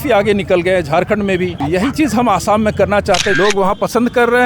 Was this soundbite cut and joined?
yes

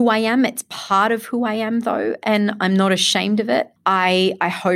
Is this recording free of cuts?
no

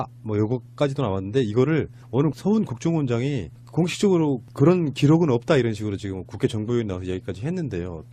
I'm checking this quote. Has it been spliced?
no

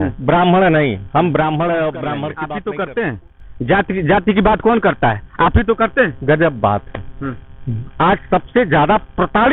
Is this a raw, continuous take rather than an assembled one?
no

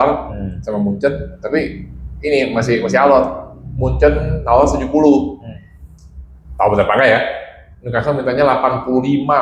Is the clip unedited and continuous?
yes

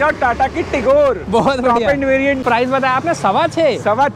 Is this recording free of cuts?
no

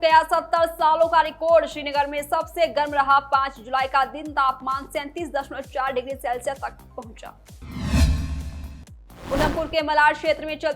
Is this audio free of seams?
no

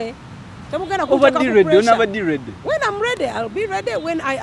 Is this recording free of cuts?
yes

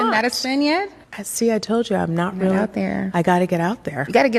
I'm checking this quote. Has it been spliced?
no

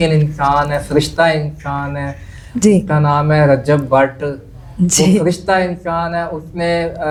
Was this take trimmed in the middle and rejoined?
no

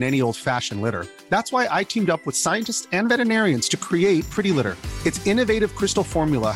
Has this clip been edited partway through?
no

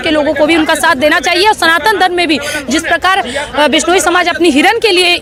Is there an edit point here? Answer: no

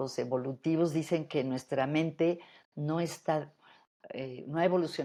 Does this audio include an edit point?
no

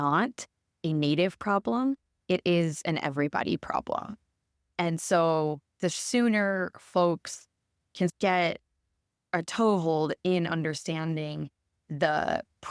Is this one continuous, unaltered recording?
yes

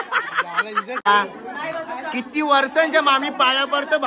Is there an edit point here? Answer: yes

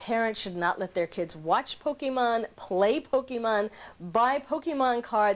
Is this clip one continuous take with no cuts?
yes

